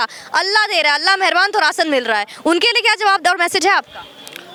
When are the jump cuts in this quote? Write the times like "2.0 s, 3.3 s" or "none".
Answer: none